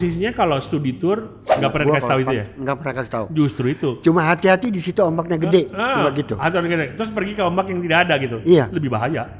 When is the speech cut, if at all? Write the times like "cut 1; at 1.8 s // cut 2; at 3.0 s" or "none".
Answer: cut 1; at 1.5 s